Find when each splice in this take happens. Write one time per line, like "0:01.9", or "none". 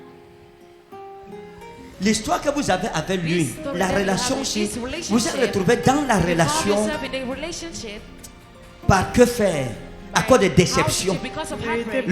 0:01.7